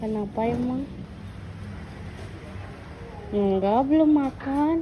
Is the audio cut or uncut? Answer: cut